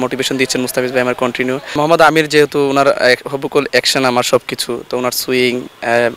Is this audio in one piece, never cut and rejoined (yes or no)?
no